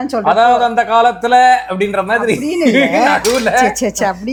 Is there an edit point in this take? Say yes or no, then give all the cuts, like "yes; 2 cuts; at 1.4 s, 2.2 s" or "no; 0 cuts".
no; 0 cuts